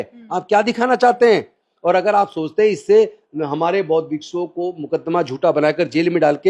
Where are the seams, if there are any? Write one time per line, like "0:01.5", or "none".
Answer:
none